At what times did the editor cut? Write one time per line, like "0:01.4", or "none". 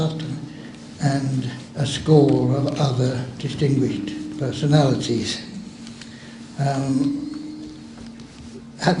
0:02.0